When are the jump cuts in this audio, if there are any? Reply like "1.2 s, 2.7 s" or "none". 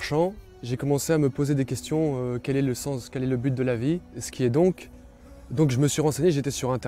4.2 s

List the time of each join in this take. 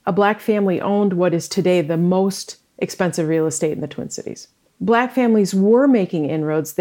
1.5 s, 4.6 s

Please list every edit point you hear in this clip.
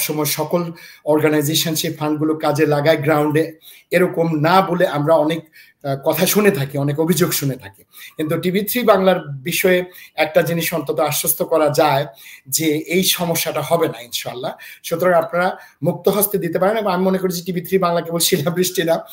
none

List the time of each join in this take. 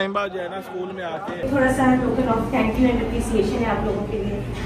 1.4 s

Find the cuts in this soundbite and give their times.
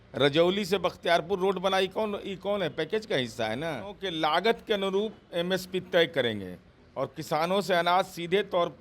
4.0 s

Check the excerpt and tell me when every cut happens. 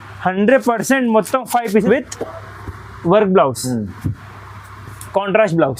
1.8 s

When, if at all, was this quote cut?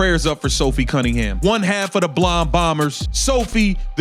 1.3 s, 3.1 s

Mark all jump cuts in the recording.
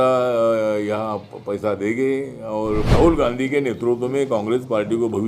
2.9 s

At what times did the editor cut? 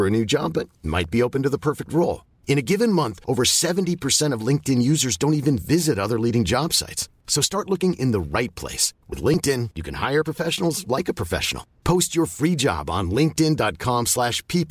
none

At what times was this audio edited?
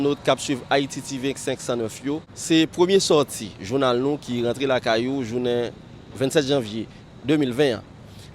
2.3 s

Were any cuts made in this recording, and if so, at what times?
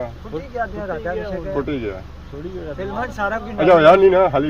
none

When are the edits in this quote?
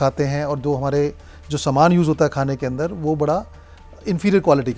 none

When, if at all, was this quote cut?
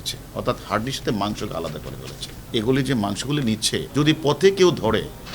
2.3 s, 3.9 s

